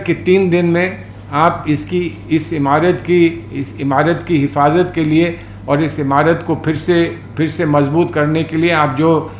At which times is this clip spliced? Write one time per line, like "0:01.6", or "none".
none